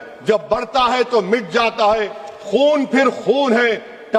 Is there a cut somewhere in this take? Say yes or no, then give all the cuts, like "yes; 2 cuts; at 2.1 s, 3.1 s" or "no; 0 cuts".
no; 0 cuts